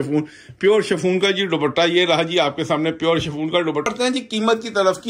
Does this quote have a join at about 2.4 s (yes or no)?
no